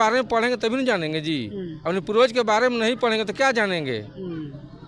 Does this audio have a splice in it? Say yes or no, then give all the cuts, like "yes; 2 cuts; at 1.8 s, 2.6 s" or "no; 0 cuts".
no; 0 cuts